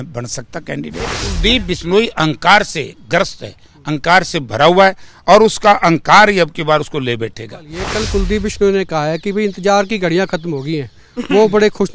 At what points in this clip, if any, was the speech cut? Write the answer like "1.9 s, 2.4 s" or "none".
1.2 s, 7.9 s